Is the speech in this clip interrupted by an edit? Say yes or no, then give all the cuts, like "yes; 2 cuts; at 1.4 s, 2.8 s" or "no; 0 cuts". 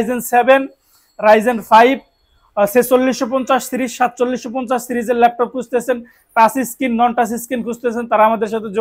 no; 0 cuts